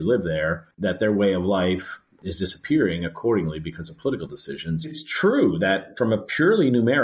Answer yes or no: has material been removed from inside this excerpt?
yes